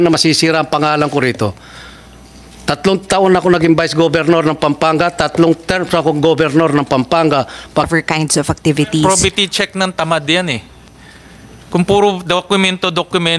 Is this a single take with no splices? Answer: no; 1 cut; at 7.9 s

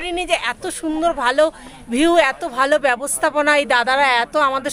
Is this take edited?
no; 0 cuts

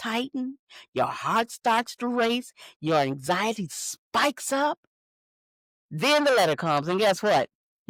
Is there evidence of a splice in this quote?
no; 0 cuts

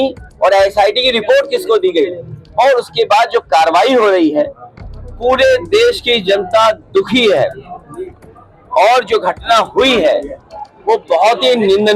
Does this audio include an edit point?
no; 0 cuts

